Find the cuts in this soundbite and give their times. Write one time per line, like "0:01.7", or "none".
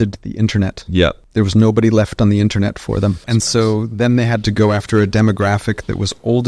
0:01.2
0:03.2
0:04.5